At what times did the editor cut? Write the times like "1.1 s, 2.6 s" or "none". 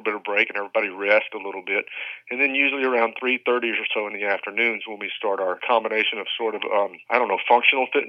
5.6 s, 7.0 s